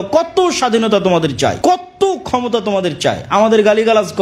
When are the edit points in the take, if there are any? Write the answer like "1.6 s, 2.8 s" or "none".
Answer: 1.6 s